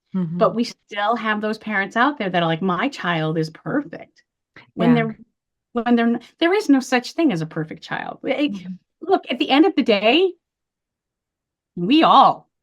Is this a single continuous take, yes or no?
yes